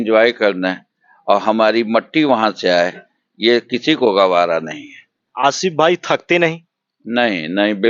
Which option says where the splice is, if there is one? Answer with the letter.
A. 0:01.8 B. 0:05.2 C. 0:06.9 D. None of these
B